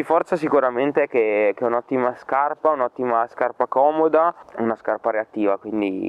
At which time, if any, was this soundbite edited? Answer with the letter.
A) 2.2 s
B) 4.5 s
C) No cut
B